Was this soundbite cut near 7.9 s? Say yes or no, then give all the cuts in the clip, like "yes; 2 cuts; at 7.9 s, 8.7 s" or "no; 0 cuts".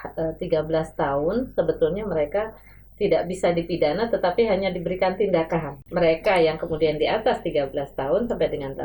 no; 1 cut; at 5.8 s